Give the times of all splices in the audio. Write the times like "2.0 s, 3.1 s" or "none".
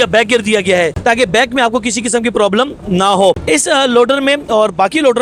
none